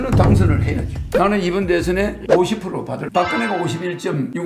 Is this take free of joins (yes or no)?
no